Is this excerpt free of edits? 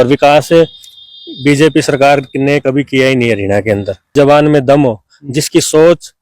no; 1 cut; at 4.1 s

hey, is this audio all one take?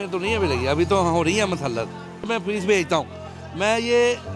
no; 1 cut; at 2.3 s

